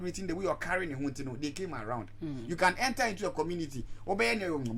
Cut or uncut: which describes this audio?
uncut